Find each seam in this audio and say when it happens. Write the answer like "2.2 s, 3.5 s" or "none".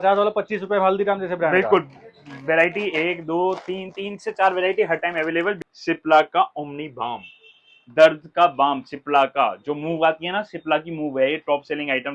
5.6 s

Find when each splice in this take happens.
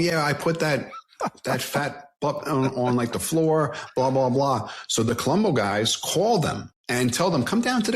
6.7 s

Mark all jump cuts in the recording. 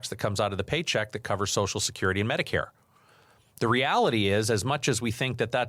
none

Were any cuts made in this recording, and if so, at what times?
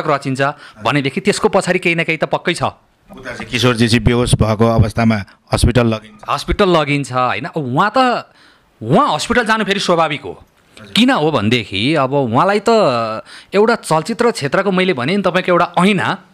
none

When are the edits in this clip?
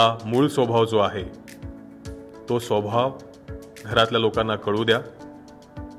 none

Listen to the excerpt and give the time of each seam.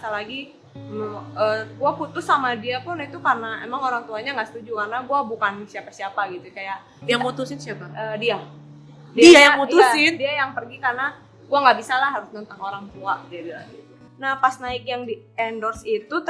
14.0 s

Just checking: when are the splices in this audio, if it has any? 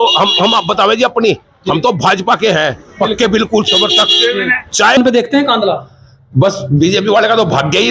5.0 s

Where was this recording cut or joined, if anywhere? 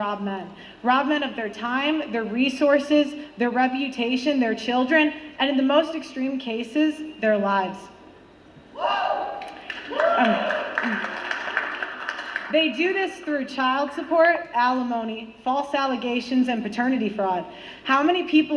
12.7 s

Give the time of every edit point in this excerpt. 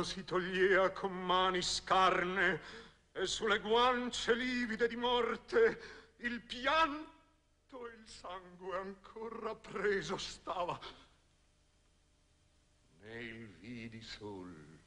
1.7 s

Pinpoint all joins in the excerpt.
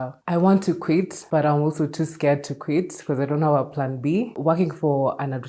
1.2 s, 4.3 s

